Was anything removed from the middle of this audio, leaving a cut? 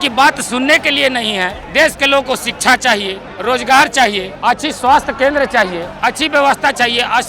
yes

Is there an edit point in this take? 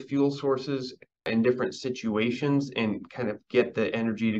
yes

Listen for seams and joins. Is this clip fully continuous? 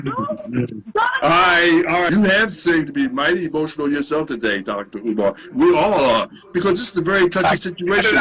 no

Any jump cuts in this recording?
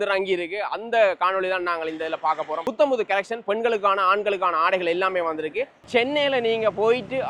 yes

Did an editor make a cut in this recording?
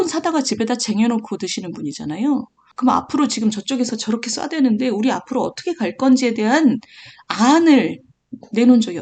yes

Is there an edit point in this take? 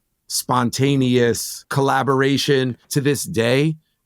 yes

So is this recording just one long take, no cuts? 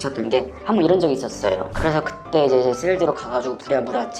no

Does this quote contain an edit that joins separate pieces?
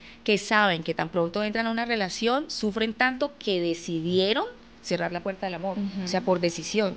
no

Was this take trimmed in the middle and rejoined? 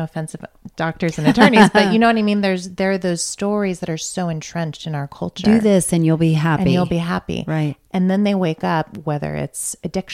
no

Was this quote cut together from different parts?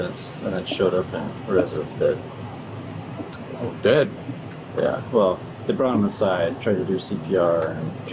no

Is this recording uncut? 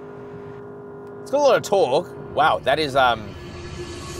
no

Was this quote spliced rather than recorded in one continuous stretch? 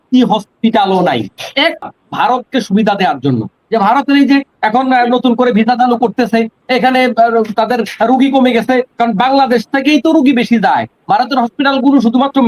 yes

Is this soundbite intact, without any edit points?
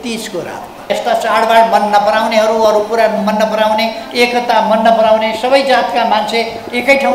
no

